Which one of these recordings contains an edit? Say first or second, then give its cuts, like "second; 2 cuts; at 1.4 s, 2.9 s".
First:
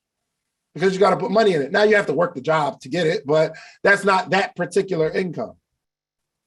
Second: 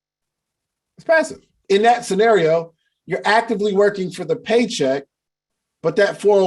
second; 1 cut; at 1.5 s